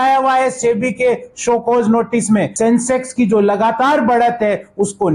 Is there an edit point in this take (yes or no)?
yes